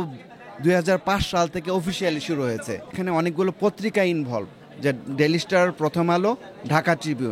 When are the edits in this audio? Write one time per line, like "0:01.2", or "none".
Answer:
0:02.9